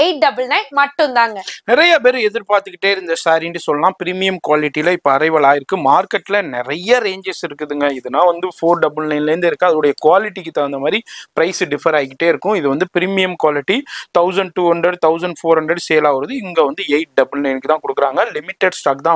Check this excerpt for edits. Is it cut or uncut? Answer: uncut